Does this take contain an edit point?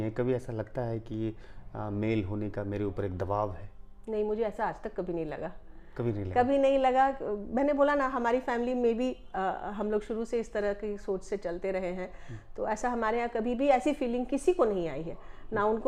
no; 0 cuts

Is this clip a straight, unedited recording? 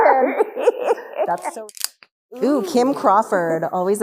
no; 1 cut; at 1.5 s

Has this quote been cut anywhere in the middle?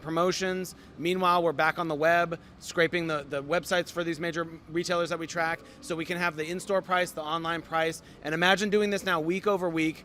no; 0 cuts

